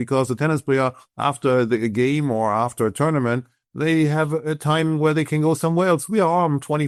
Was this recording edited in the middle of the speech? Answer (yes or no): no